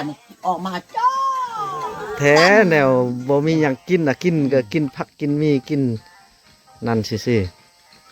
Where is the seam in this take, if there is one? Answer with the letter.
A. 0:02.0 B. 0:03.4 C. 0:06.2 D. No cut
D